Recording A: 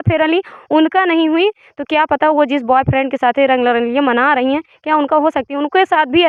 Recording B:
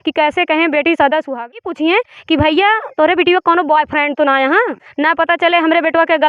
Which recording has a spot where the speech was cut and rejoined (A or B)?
B